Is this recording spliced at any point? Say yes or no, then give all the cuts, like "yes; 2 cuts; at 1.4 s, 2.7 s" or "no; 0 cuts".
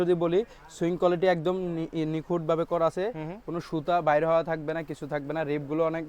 no; 0 cuts